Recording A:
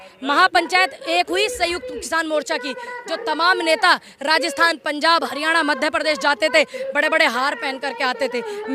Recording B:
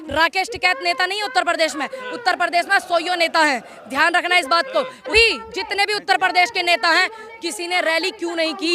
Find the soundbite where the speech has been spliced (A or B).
B